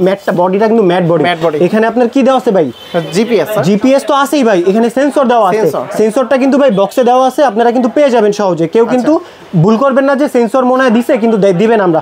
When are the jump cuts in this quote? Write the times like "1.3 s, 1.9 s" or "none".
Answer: none

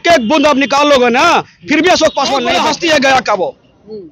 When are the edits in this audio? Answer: 2.5 s

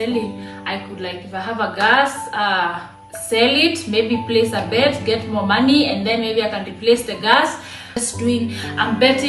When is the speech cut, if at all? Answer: 8.1 s

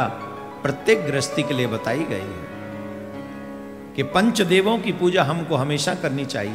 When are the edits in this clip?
none

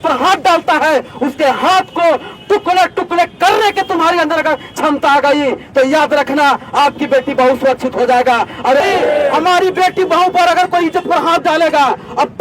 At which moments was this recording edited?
8.8 s

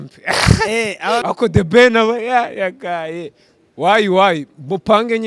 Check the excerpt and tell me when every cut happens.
1.2 s

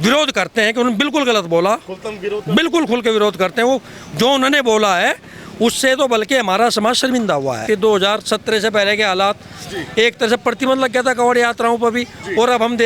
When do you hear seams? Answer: 7.6 s

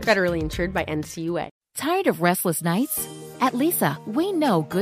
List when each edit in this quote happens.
1.5 s

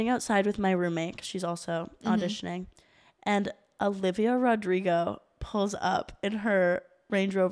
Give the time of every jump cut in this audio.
none

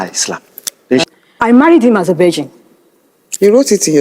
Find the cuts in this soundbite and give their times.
1.0 s

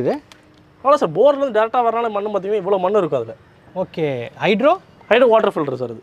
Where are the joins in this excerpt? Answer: none

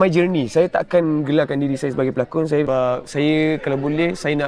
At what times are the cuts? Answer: 2.7 s

